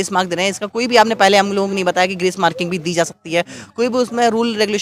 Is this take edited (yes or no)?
no